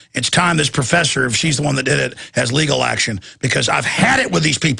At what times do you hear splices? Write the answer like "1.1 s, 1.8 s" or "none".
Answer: 1.8 s